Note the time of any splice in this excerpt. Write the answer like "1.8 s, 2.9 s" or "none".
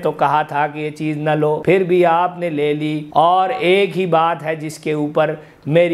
1.6 s, 3.0 s